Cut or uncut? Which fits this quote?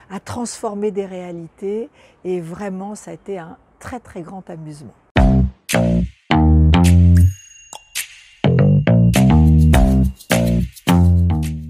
cut